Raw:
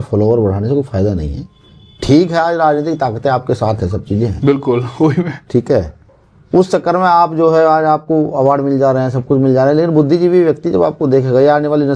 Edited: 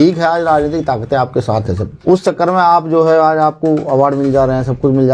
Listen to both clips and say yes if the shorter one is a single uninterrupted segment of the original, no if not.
no